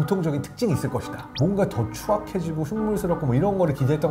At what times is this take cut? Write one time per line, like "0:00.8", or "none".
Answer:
0:01.3